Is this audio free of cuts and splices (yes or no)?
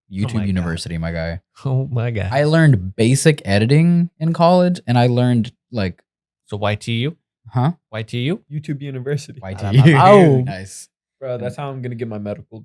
no